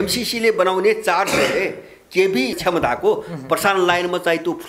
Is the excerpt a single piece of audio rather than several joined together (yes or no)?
no